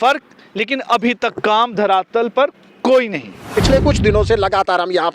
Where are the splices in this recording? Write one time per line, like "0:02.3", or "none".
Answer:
0:03.5